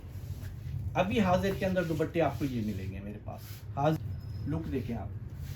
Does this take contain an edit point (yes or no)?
yes